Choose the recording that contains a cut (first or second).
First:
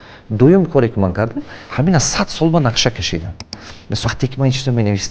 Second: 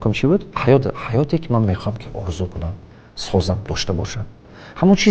first